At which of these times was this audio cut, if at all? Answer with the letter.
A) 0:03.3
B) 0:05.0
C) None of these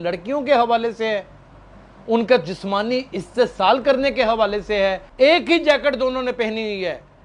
B